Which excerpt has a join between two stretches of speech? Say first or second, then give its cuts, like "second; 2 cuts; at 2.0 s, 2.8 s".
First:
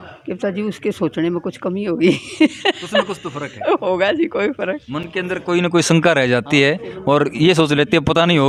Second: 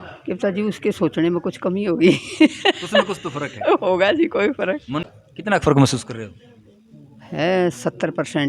second; 1 cut; at 5.1 s